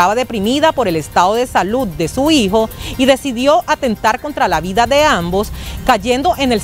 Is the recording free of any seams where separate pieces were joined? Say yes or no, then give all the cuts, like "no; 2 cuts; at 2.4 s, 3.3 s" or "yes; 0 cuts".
yes; 0 cuts